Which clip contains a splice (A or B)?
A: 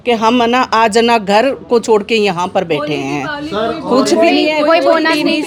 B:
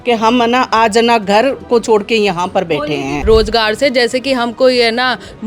B